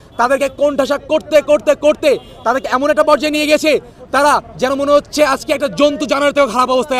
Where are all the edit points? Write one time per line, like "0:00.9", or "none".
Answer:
none